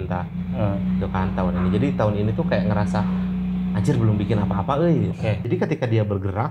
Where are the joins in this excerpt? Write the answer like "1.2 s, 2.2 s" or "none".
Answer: 5.4 s

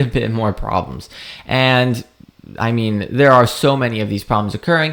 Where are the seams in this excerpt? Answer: none

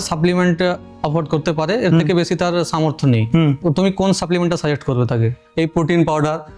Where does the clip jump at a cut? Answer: 3.6 s, 5.4 s

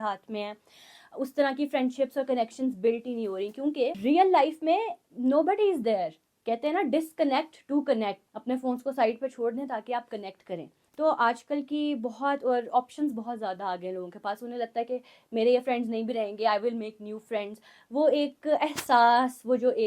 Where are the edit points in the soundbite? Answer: 4.0 s, 6.3 s, 8.3 s, 10.8 s

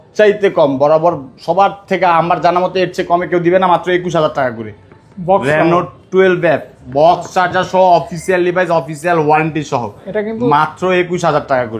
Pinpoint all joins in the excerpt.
none

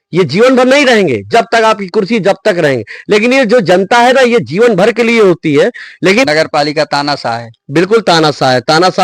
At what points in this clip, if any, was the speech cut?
6.2 s

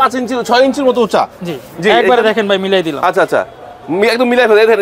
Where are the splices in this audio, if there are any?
none

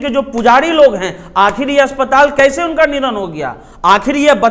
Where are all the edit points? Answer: none

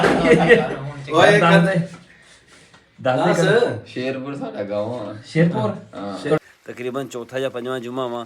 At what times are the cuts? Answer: 6.4 s

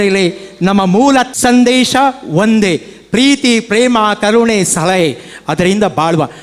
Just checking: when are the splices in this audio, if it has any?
1.3 s

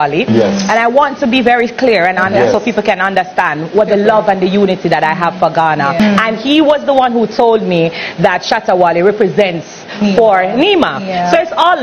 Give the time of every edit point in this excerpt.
6.0 s

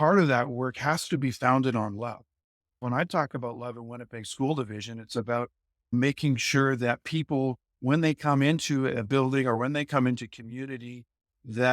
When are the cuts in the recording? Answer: 2.8 s

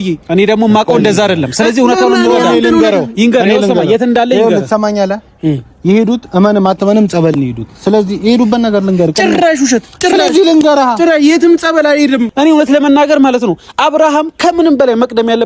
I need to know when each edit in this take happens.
12.3 s

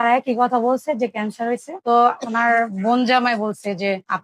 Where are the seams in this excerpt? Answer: 1.7 s

